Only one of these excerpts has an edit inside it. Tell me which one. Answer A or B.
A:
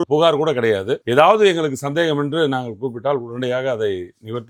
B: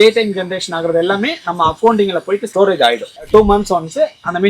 B